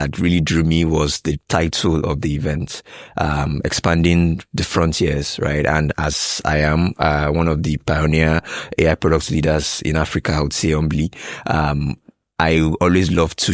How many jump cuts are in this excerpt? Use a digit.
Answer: 0